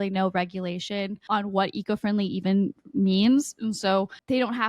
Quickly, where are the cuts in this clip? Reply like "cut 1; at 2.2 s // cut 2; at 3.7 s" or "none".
cut 1; at 1.2 s